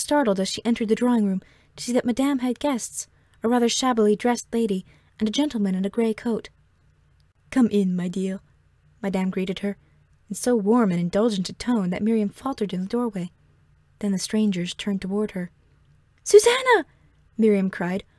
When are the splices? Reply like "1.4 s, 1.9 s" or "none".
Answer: none